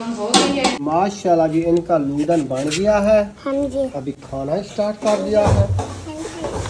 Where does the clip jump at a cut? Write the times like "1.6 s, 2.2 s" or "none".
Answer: 0.9 s

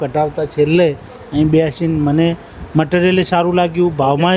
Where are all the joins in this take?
none

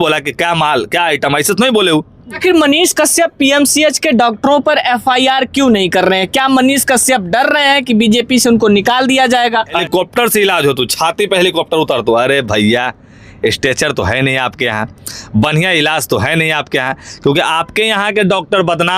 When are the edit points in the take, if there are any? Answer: 2.2 s, 9.8 s

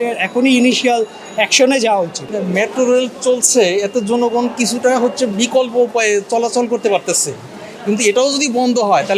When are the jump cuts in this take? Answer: 2.2 s

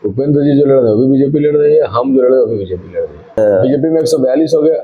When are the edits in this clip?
3.4 s

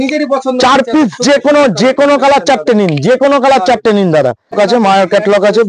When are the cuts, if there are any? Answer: 4.5 s

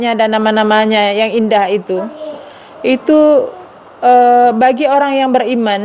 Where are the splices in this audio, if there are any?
none

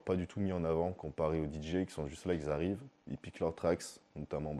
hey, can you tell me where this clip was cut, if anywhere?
none

